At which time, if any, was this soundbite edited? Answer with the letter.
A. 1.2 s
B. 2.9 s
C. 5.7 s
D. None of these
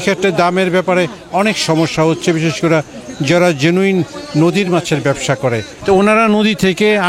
C